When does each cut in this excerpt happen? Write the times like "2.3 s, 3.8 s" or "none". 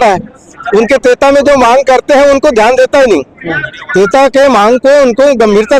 none